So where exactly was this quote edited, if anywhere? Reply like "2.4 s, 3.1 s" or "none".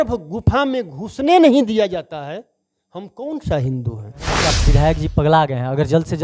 4.3 s